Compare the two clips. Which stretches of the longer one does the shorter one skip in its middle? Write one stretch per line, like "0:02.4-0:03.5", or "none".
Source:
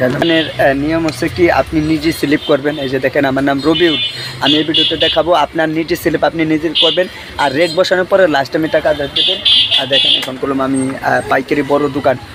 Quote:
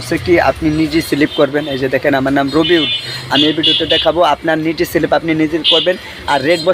none